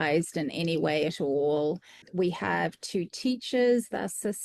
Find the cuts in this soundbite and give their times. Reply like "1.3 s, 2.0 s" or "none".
2.0 s